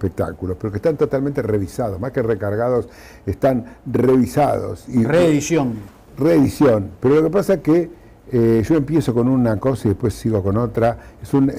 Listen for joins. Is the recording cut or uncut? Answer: uncut